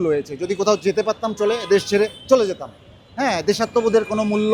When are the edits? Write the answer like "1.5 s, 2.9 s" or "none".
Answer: none